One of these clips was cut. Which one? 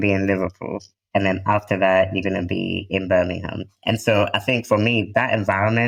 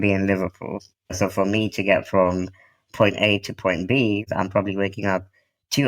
second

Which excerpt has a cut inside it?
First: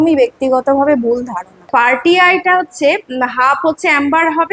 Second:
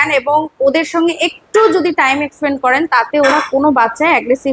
first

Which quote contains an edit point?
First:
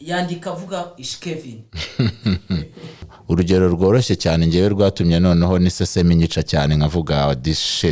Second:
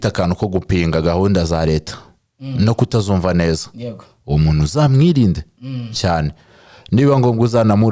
first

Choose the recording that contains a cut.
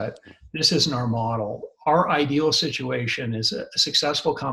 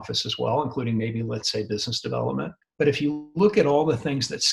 second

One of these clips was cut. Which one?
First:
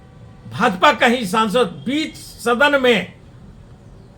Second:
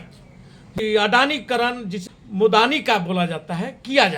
second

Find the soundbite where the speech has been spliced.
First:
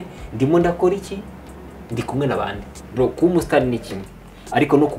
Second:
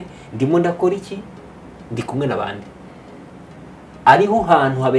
first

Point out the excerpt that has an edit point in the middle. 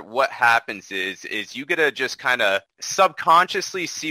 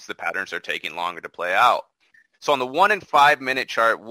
first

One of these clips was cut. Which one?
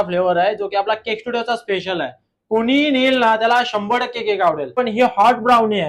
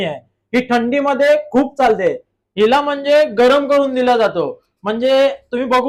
first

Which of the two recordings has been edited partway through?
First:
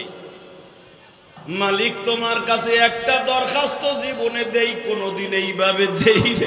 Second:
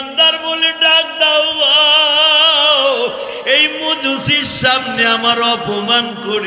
first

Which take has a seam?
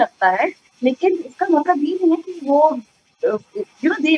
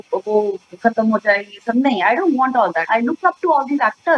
second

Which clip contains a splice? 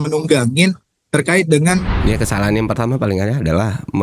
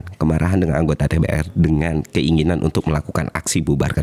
first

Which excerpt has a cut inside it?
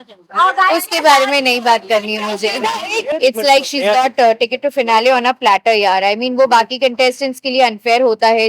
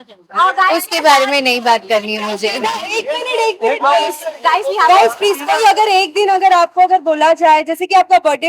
first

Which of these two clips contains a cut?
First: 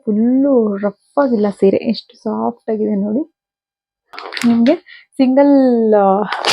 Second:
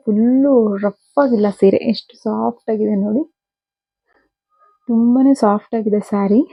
first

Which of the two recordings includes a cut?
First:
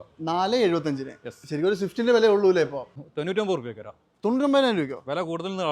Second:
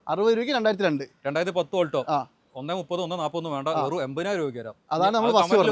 first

